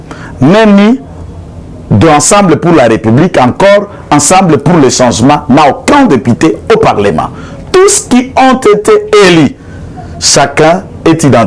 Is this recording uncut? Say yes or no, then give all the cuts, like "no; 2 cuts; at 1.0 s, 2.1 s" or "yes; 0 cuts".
yes; 0 cuts